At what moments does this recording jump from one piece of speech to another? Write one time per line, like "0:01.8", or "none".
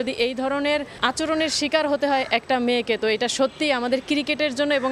0:00.9